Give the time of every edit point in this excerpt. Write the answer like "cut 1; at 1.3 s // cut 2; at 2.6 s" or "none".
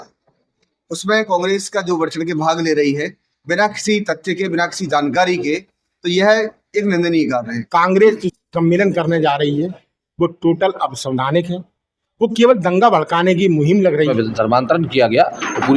cut 1; at 7.6 s // cut 2; at 14.1 s